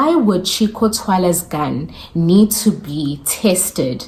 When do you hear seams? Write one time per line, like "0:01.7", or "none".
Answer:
none